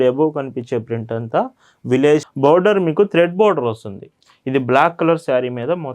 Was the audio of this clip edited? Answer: yes; 1 cut; at 2.3 s

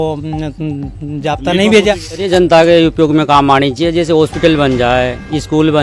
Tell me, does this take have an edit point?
yes; 1 cut; at 2.1 s

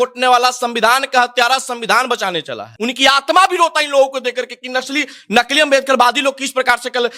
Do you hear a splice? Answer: yes; 1 cut; at 2.7 s

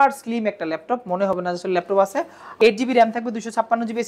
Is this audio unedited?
no; 1 cut; at 2.4 s

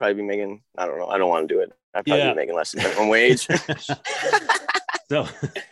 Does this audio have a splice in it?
no; 0 cuts

